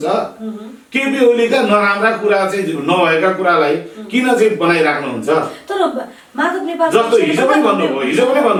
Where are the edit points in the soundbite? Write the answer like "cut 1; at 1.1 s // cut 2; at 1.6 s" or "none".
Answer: none